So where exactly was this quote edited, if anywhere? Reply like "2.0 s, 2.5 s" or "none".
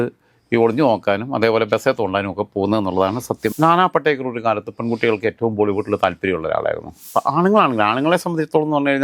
3.5 s, 6.9 s